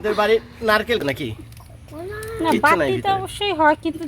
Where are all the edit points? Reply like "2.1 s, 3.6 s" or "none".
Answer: 1.0 s

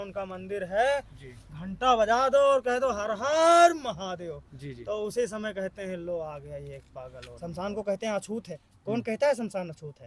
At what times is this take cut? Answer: 7.4 s

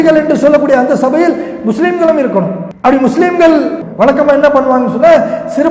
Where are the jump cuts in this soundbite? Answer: 2.6 s, 3.8 s

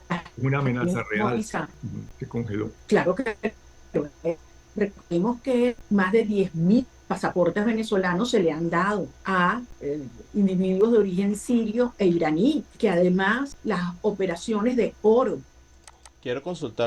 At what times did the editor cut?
none

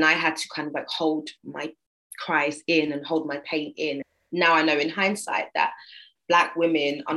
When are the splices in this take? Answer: 4.0 s

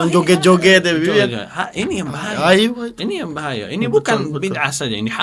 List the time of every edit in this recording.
none

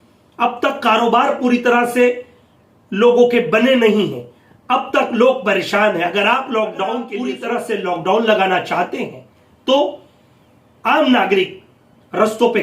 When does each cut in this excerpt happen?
7.3 s

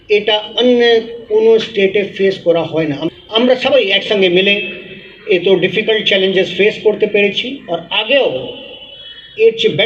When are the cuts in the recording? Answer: 3.0 s

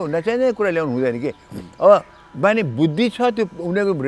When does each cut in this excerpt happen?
none

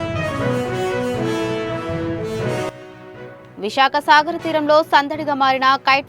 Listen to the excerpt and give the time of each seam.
2.8 s

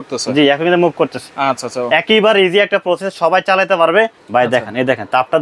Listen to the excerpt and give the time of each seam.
4.2 s

